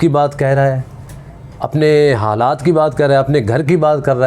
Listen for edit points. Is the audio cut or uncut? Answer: uncut